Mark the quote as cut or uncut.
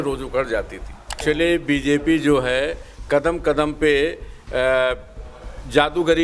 cut